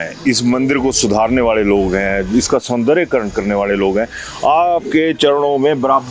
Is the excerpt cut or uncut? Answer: uncut